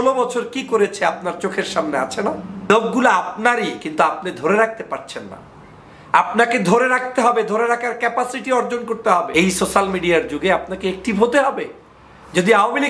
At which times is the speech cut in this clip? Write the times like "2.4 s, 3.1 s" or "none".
2.7 s, 9.3 s

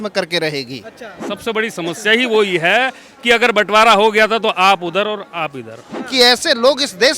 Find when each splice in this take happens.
1.1 s, 6.0 s

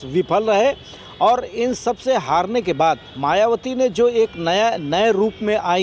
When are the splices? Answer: 3.1 s

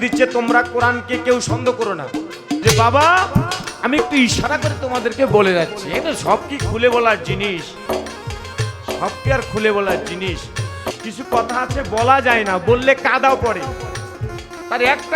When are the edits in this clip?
2.6 s, 10.9 s, 14.1 s

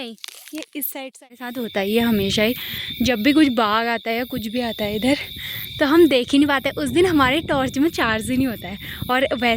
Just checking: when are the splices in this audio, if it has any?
1.6 s

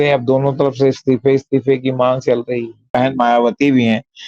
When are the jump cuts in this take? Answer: 3.0 s

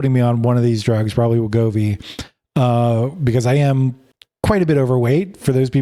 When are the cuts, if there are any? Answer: none

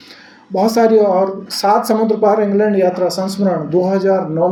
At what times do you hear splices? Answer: none

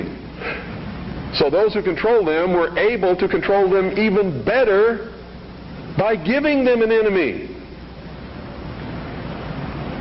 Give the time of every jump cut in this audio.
8.6 s

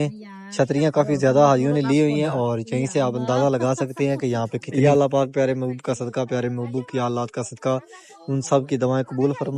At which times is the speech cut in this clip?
4.6 s

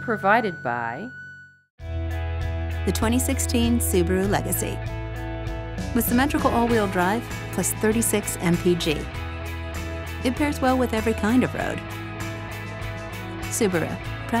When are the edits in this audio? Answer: 1.1 s

